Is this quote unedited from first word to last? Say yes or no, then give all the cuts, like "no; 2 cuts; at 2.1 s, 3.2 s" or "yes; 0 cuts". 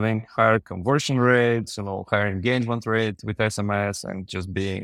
yes; 0 cuts